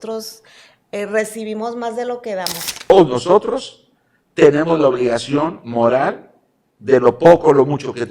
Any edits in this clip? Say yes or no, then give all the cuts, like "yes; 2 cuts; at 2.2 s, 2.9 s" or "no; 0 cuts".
yes; 1 cut; at 2.9 s